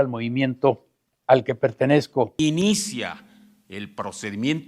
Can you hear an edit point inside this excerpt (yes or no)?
yes